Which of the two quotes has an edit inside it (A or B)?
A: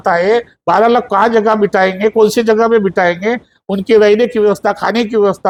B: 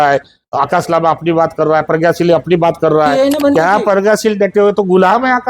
B